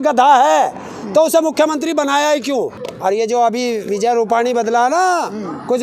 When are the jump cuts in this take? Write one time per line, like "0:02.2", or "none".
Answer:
0:02.8